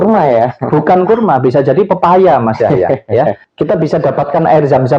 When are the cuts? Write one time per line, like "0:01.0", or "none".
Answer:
0:03.4